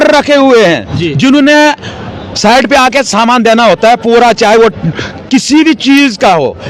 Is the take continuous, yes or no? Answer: yes